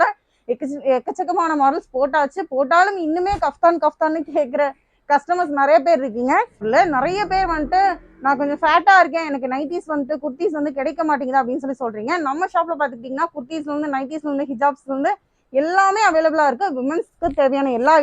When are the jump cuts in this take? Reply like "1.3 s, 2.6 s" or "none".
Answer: 6.6 s